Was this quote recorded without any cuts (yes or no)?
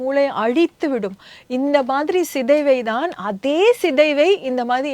yes